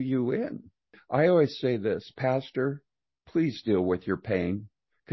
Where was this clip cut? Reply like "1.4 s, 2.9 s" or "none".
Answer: 1.0 s